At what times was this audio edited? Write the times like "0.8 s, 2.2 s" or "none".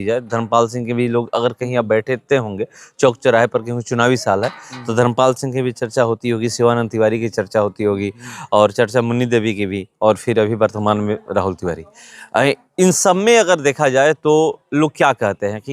none